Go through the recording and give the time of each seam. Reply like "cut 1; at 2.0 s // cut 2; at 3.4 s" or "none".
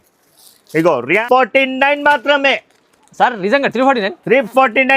cut 1; at 1.2 s